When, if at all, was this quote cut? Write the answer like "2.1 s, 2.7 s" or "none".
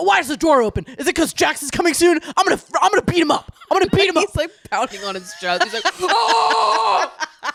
none